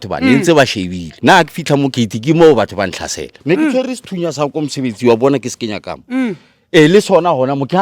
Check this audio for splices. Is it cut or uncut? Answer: cut